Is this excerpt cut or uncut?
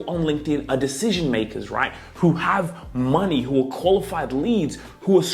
uncut